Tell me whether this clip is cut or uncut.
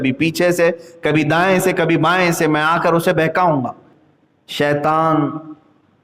cut